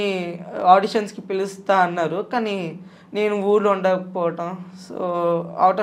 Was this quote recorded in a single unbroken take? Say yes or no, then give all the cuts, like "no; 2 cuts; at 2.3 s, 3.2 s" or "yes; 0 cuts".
yes; 0 cuts